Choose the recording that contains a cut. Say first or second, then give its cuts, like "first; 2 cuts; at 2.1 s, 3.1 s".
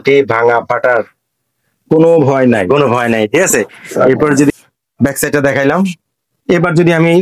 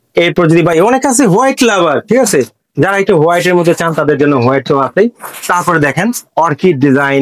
first; 1 cut; at 4.5 s